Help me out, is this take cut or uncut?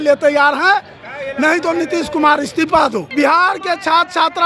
cut